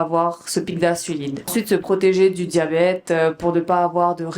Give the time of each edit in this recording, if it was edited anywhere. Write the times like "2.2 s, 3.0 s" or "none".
1.5 s